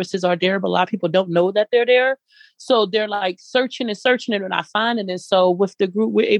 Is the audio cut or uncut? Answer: uncut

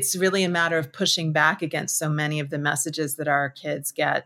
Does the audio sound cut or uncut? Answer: uncut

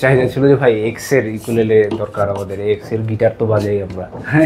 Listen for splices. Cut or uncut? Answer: uncut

